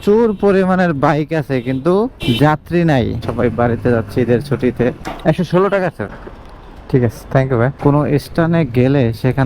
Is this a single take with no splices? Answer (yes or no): no